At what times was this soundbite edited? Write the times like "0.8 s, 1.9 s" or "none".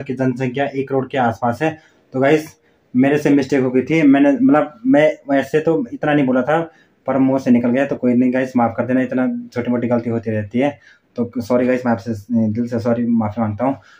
none